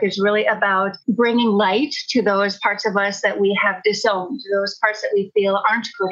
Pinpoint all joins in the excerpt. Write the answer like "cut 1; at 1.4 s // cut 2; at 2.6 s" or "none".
cut 1; at 1.0 s